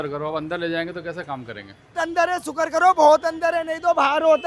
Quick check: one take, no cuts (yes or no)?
no